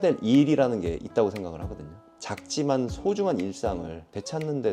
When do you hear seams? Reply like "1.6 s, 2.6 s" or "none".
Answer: 1.9 s